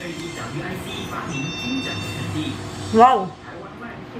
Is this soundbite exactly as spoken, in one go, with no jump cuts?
yes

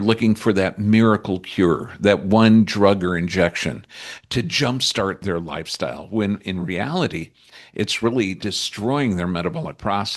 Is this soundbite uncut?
no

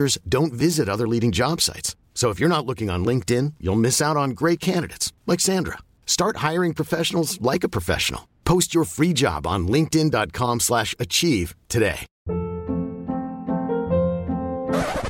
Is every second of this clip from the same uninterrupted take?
no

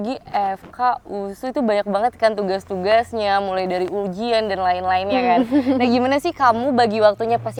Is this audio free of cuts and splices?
yes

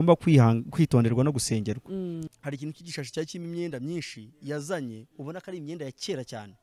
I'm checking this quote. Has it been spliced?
yes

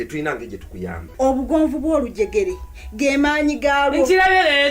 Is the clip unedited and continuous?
no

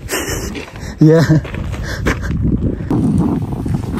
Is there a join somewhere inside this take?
yes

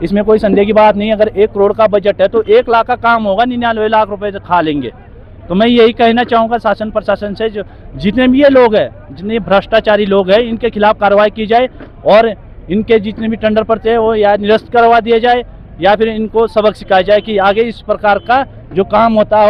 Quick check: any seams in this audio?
no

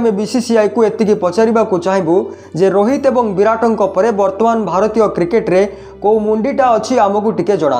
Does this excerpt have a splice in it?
no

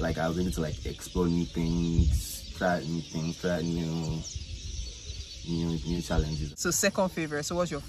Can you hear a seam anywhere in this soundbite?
yes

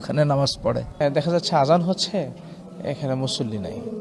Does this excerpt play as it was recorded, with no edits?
no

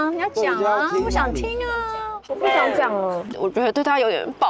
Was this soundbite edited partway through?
yes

